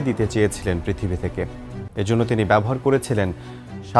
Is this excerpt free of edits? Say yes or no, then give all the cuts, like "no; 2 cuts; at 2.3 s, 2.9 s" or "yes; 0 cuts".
yes; 0 cuts